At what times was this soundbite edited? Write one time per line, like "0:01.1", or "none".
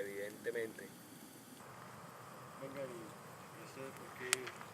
0:01.3